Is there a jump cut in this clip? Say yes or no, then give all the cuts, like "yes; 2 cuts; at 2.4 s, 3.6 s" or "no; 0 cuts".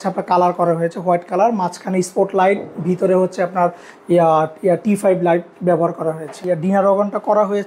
yes; 1 cut; at 6.4 s